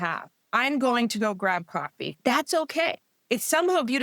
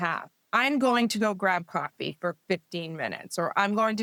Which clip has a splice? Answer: first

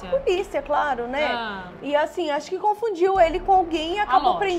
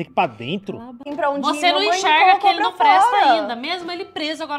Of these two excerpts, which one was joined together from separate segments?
second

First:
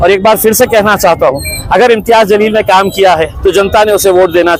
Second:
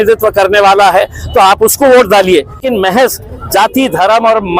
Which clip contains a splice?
second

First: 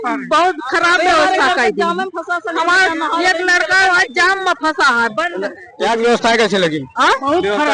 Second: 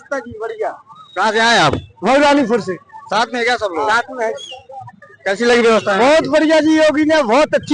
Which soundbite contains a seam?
first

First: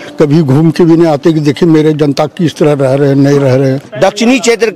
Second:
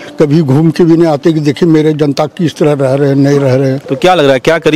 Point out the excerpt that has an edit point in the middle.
first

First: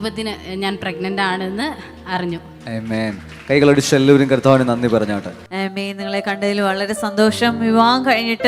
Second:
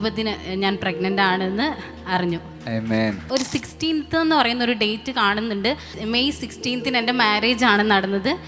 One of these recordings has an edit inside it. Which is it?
second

